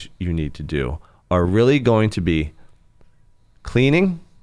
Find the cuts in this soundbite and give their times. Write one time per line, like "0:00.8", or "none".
none